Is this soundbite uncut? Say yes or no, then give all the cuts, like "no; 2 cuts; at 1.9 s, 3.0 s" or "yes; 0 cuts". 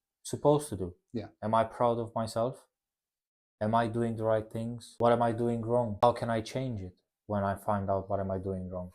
no; 2 cuts; at 4.8 s, 6.0 s